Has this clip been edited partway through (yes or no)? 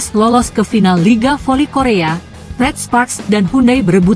no